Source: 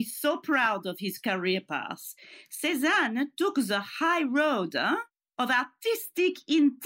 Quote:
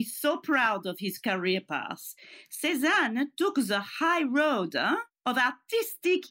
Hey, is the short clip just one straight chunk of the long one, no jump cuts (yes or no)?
no